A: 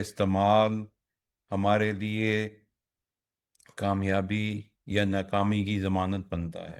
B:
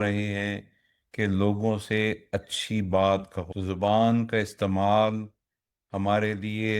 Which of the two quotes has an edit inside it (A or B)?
B